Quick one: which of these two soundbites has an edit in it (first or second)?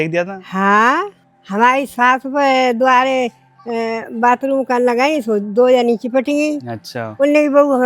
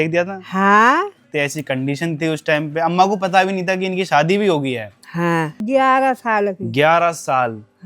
second